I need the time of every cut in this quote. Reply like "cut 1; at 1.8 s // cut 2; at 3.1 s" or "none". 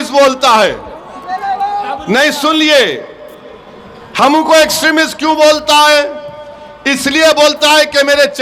none

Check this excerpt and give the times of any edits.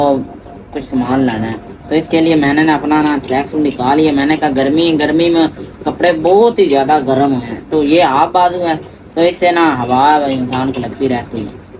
none

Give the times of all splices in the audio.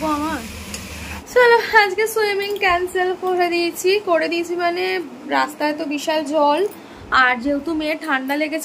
cut 1; at 1.2 s

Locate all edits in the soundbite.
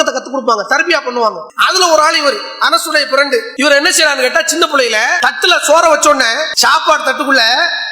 cut 1; at 1.5 s // cut 2; at 3.5 s // cut 3; at 5.2 s // cut 4; at 6.5 s

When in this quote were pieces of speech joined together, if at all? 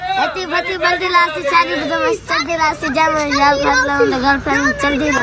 none

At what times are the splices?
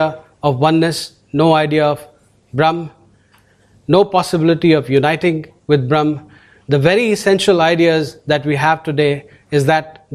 none

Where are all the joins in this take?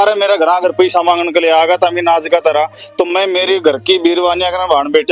none

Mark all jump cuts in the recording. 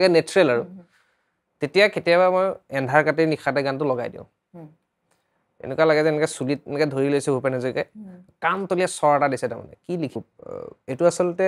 cut 1; at 10.2 s

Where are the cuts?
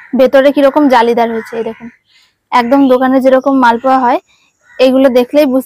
none

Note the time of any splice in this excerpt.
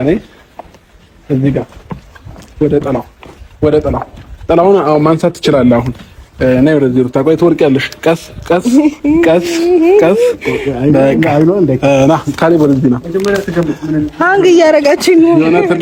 none

